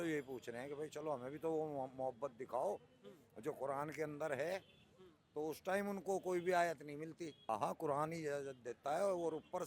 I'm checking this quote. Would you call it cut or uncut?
cut